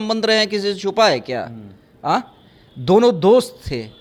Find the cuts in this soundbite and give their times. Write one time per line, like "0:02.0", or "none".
none